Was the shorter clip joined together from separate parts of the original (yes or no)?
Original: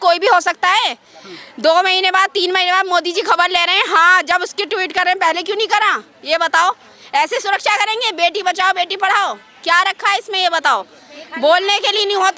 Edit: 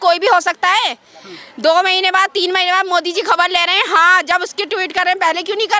no